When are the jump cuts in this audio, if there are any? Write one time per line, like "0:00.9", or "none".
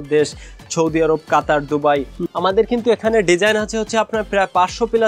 0:02.2